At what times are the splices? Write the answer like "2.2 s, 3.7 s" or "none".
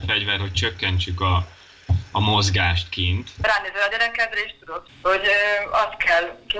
3.4 s, 4.8 s